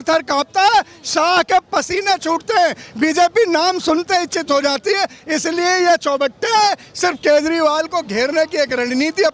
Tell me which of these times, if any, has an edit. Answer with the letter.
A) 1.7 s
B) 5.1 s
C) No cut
C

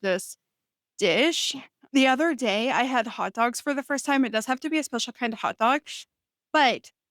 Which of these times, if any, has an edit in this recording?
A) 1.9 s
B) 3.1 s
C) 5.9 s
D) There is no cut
A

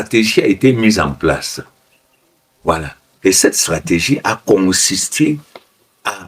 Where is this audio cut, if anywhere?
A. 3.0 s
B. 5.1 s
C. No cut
A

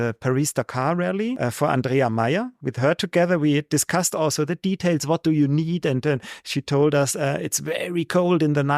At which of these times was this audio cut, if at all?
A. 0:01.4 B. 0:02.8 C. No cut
A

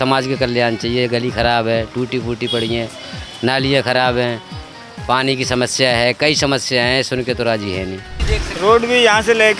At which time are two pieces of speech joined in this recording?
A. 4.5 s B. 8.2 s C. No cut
B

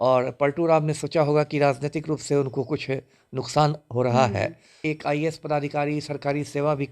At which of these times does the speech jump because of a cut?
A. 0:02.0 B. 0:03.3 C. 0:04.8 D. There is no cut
C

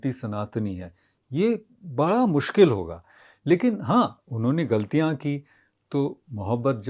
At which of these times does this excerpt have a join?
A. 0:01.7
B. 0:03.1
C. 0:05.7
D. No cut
D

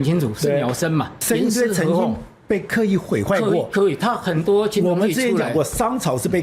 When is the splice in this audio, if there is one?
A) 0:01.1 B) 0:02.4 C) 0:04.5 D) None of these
A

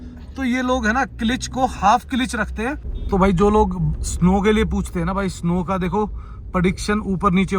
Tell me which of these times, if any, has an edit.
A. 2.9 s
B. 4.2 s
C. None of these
A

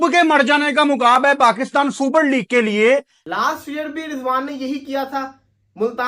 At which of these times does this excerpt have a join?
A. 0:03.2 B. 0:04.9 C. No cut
A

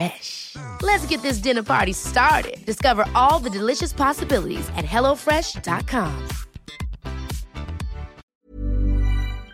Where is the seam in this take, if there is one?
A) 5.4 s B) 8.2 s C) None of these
B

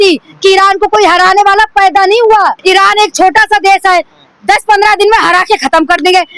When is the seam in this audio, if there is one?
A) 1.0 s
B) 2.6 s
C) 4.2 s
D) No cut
B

